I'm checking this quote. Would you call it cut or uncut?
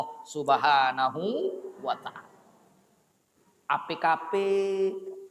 uncut